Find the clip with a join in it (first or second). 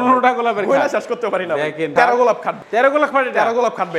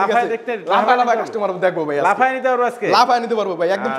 first